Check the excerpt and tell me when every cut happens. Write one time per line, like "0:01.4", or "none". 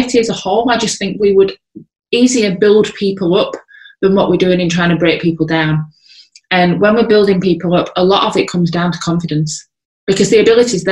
none